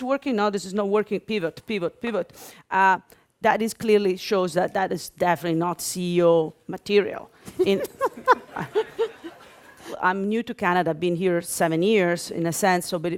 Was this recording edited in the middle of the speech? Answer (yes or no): no